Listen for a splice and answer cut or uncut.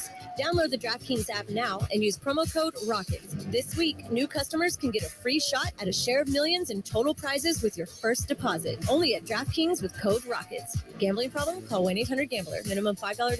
uncut